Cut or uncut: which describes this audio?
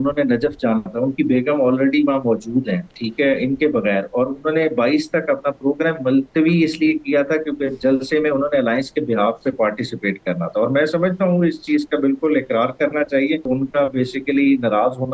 cut